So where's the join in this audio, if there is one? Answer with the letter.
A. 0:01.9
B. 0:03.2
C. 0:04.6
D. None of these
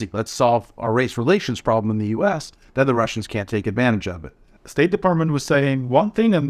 C